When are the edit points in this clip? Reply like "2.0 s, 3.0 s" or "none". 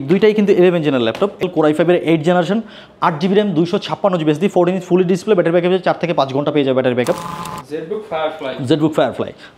1.4 s, 7.4 s

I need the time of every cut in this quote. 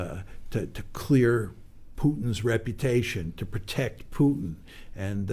none

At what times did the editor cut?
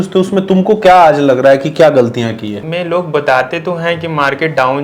2.6 s

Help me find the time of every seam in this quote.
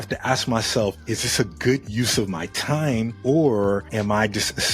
3.1 s

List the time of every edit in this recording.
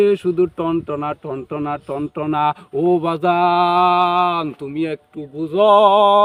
none

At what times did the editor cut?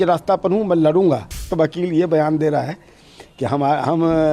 1.5 s

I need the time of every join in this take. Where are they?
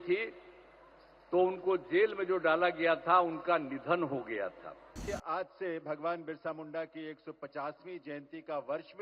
5.0 s

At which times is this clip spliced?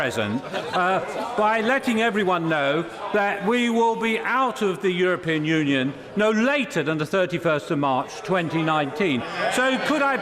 9.3 s

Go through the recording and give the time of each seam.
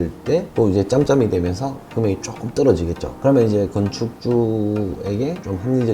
3.1 s

